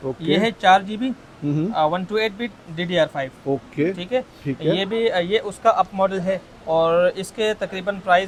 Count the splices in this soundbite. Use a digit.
0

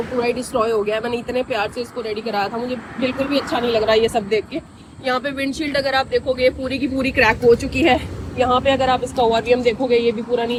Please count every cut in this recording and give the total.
0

